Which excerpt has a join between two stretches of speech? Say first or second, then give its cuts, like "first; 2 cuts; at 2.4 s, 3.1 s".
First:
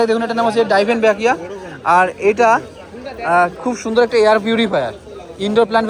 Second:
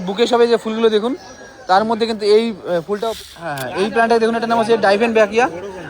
second; 1 cut; at 3.0 s